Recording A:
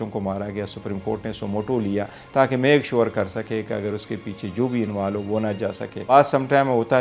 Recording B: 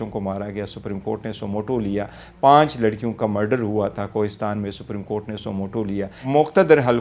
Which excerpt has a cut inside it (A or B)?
B